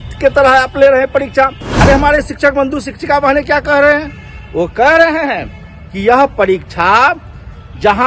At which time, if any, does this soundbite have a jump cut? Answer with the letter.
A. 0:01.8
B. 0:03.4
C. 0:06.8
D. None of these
A